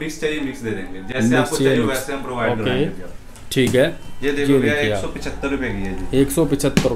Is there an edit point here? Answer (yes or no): no